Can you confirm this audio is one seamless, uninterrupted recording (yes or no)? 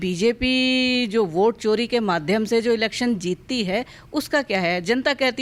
yes